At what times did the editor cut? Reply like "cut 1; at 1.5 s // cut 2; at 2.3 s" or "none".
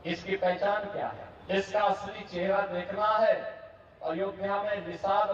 cut 1; at 1.3 s